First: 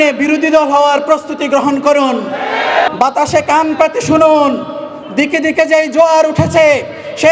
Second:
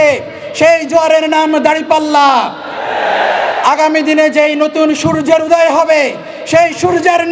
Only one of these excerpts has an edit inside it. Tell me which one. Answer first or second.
first